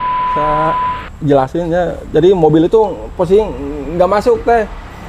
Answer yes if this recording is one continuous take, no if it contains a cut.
no